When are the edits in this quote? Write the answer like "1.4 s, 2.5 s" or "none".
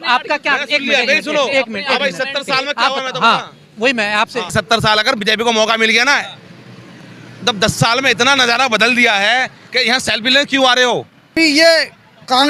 4.5 s, 11.3 s